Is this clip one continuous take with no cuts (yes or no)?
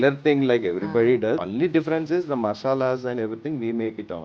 no